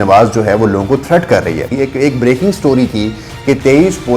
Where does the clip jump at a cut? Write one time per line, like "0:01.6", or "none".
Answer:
0:01.7